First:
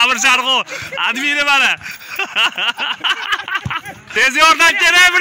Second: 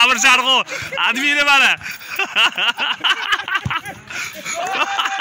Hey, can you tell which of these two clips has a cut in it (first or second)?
first